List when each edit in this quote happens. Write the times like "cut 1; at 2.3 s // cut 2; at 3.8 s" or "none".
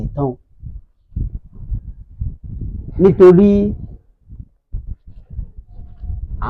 none

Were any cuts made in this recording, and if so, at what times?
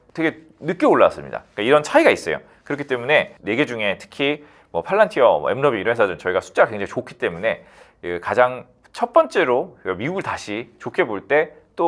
cut 1; at 3.4 s

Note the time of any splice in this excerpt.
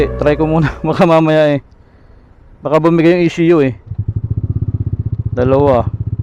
none

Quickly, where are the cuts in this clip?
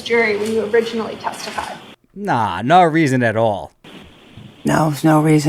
none

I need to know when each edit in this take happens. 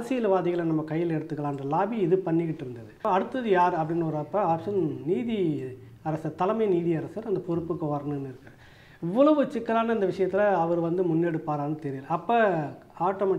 cut 1; at 3.0 s

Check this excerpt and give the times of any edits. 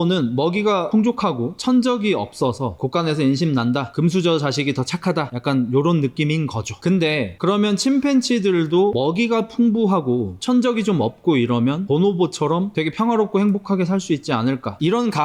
none

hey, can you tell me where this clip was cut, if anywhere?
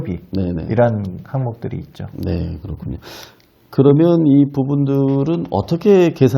none

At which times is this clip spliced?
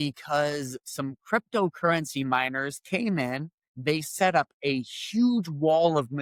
none

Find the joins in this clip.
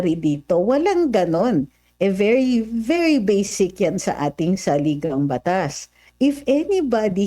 cut 1; at 6.0 s

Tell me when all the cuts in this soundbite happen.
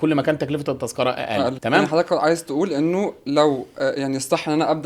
cut 1; at 1.6 s

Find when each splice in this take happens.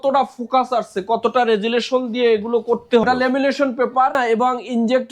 cut 1; at 3.0 s // cut 2; at 4.2 s

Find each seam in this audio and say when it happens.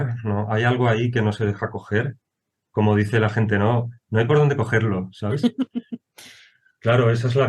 none

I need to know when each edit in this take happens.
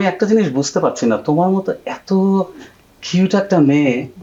none

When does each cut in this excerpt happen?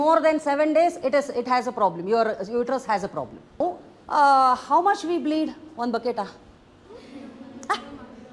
cut 1; at 3.6 s

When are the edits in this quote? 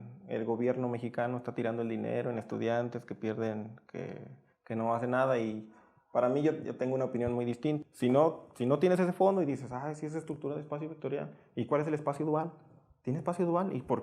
cut 1; at 7.8 s

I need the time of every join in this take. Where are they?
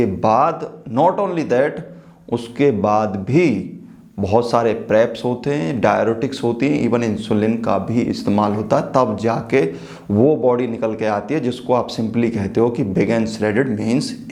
none

